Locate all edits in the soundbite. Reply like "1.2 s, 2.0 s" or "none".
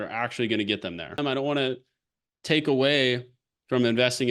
1.2 s